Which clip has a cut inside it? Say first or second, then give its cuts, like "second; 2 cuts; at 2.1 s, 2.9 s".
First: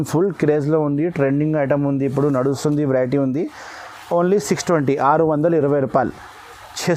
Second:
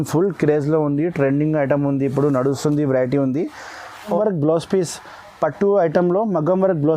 second; 1 cut; at 4.1 s